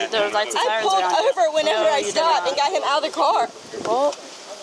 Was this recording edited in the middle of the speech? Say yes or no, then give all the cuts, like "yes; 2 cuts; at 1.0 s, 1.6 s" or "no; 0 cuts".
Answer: no; 0 cuts